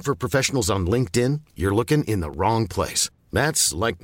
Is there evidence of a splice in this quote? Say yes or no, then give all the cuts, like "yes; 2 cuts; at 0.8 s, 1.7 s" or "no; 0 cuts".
no; 0 cuts